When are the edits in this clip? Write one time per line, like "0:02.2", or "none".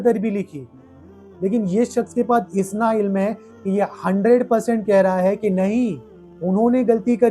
0:01.2